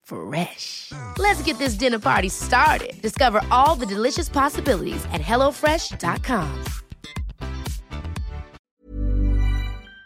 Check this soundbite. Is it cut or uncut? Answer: cut